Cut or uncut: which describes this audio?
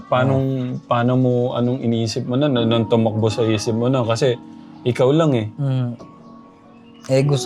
uncut